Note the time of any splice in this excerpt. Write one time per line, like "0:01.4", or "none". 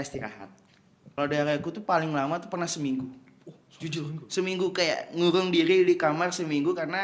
0:01.0